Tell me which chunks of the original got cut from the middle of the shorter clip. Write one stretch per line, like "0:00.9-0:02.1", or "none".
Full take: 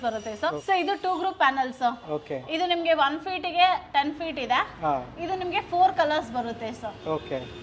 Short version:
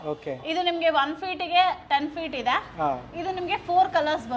none